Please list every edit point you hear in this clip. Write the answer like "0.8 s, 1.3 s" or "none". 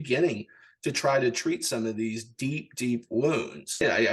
none